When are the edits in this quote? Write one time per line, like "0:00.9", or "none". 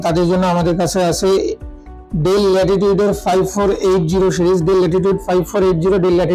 none